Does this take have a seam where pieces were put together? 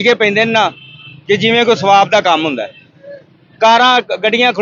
no; 0 cuts

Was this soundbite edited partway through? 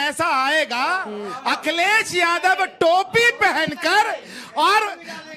no; 0 cuts

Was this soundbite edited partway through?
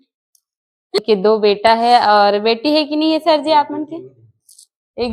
yes; 1 cut; at 1.0 s

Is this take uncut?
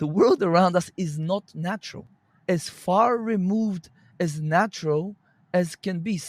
no; 1 cut; at 2.0 s

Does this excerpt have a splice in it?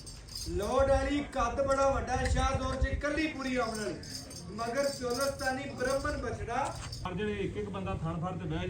yes; 1 cut; at 7.1 s

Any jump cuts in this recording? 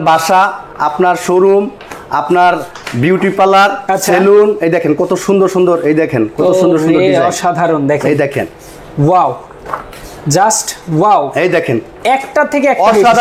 no; 0 cuts

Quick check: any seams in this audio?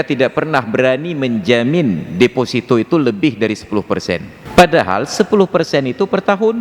yes; 1 cut; at 4.4 s

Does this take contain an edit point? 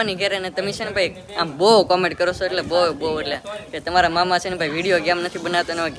no; 0 cuts

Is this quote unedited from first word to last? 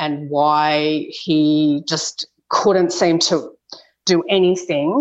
yes; 0 cuts

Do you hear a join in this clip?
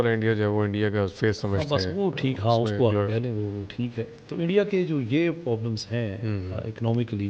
no; 0 cuts

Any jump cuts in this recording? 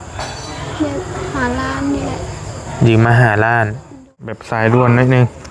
yes; 1 cut; at 4.4 s

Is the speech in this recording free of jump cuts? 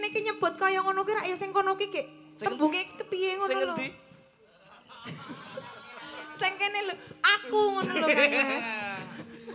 yes; 0 cuts

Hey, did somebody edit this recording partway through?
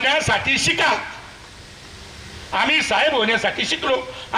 no; 0 cuts

